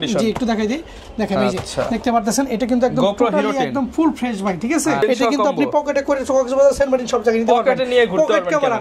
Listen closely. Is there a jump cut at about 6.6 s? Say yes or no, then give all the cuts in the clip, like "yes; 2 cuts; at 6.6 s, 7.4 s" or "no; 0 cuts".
no; 1 cut; at 5.0 s